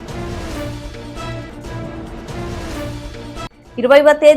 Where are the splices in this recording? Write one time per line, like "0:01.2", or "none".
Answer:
0:03.0